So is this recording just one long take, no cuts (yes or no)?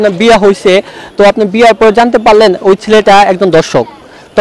yes